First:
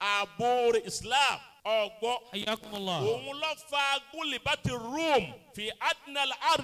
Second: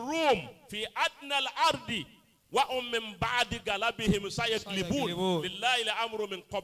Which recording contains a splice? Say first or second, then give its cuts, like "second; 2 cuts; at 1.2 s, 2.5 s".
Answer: first; 1 cut; at 1.5 s